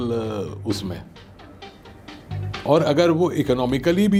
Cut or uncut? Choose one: uncut